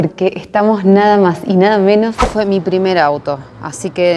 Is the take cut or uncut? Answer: cut